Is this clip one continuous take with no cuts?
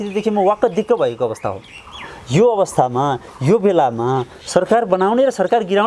yes; 0 cuts

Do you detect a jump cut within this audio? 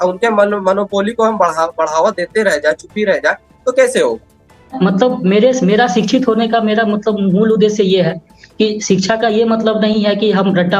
yes; 1 cut; at 4.7 s

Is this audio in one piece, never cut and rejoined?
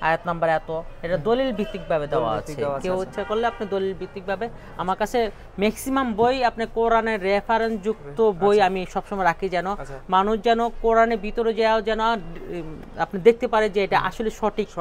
yes; 0 cuts

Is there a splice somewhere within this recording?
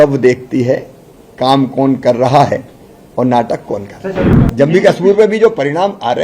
yes; 1 cut; at 4.3 s

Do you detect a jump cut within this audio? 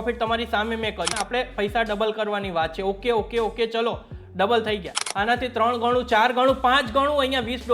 yes; 2 cuts; at 1.2 s, 5.0 s

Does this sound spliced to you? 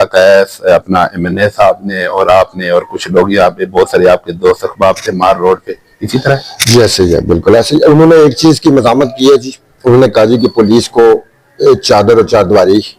no; 0 cuts

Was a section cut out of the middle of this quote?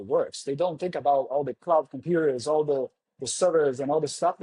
no; 0 cuts

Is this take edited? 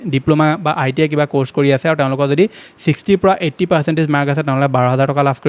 no; 0 cuts

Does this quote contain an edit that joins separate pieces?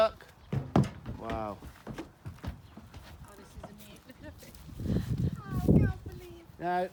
no; 0 cuts

